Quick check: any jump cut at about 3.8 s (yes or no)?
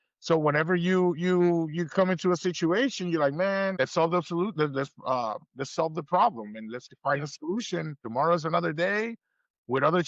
yes